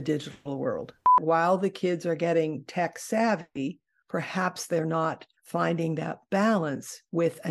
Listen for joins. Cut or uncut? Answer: cut